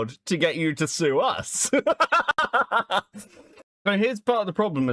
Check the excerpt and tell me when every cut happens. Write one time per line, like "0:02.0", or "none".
0:03.7